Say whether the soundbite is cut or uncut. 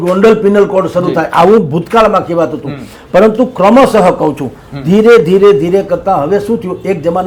uncut